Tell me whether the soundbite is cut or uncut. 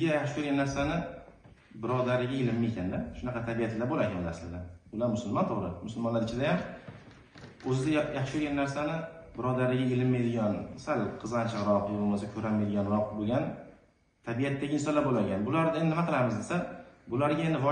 uncut